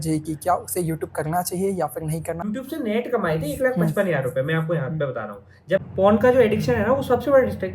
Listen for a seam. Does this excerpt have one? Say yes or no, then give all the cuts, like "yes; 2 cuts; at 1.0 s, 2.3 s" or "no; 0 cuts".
yes; 2 cuts; at 2.4 s, 5.8 s